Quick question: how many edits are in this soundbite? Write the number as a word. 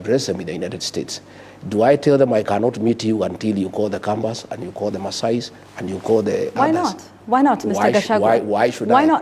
zero